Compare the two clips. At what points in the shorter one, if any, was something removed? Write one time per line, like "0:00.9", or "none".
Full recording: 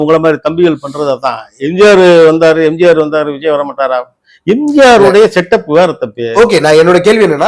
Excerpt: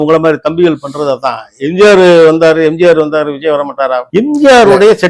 0:04.0